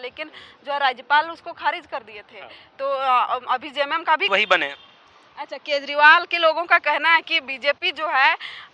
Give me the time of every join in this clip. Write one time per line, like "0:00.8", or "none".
0:04.3